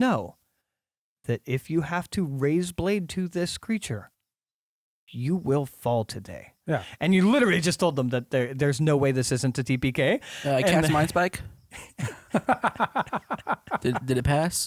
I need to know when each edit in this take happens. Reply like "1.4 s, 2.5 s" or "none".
none